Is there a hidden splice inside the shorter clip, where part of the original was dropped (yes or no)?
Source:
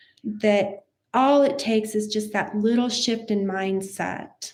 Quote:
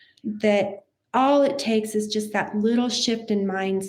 no